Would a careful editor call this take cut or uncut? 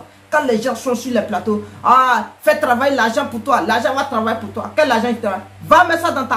uncut